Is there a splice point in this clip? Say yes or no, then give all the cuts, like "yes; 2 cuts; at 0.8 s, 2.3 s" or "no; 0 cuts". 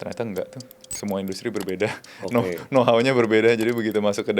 no; 0 cuts